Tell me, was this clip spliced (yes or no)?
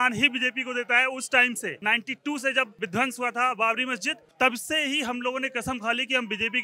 yes